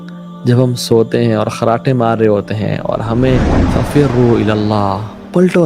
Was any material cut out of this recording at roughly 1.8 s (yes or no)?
no